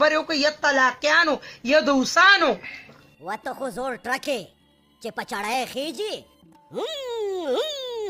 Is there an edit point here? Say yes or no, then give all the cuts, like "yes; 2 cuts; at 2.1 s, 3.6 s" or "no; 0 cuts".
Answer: yes; 1 cut; at 3.1 s